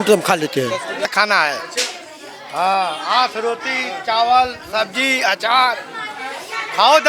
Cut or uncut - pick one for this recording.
cut